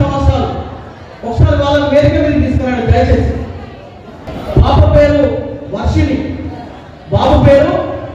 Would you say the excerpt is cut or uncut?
cut